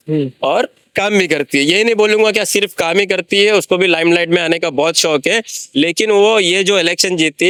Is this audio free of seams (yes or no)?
yes